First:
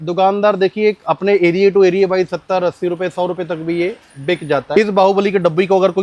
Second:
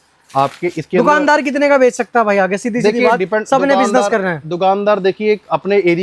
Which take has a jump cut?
first; 1 cut; at 4.8 s

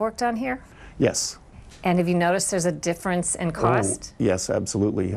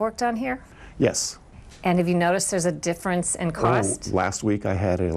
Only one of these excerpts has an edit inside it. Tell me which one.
second; 1 cut; at 4.1 s

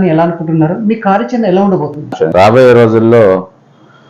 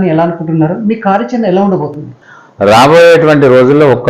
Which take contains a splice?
first; 1 cut; at 2.2 s

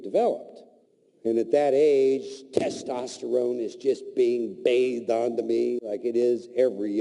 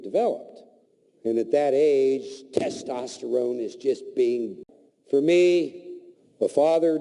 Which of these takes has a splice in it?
first; 1 cut; at 4.5 s

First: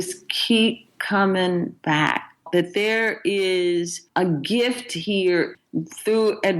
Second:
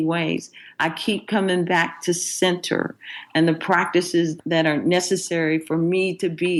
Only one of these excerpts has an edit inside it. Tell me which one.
first; 4 cuts; at 0.9 s, 1.7 s, 4.0 s, 5.5 s

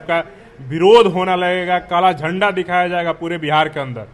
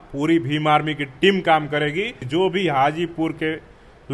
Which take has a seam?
second; 1 cut; at 2.2 s

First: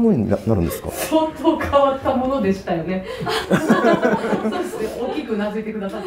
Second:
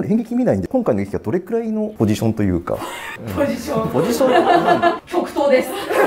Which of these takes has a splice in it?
second; 1 cut; at 5.0 s

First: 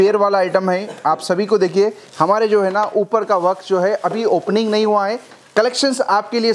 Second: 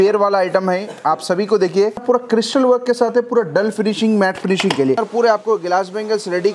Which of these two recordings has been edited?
second; 2 cuts; at 2.0 s, 5.0 s

